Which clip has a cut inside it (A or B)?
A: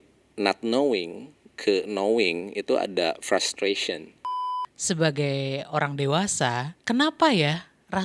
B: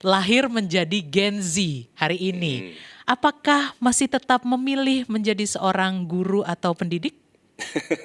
A